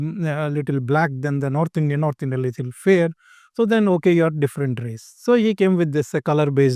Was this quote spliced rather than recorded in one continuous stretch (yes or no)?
no